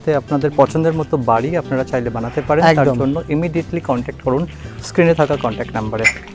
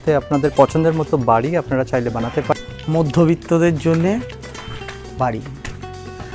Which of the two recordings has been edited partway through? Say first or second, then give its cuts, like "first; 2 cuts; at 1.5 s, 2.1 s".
second; 1 cut; at 2.5 s